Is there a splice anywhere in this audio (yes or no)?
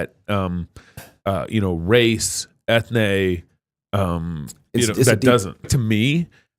yes